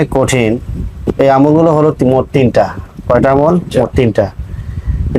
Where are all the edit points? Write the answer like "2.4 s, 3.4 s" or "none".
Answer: 1.0 s

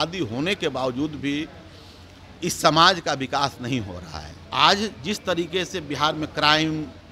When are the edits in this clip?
4.4 s

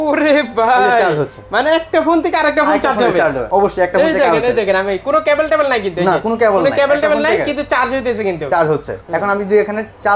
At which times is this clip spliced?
3.4 s, 9.0 s

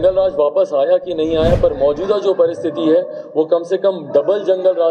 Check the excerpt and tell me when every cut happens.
none

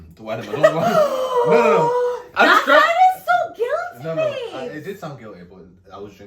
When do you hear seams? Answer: none

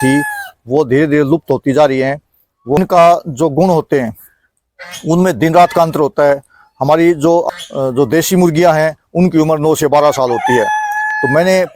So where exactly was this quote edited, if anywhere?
2.8 s, 7.5 s

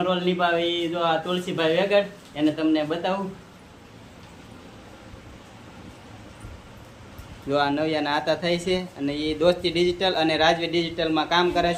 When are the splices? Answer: none

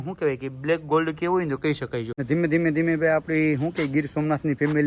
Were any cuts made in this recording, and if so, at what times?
2.1 s

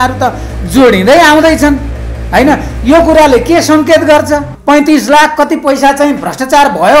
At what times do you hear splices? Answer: 4.5 s

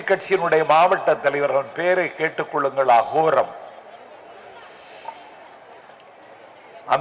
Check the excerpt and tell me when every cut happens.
none

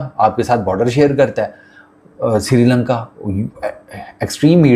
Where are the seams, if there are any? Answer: none

